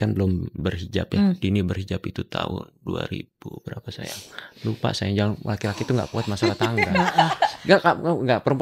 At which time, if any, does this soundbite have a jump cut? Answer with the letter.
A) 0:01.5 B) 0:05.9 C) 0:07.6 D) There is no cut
C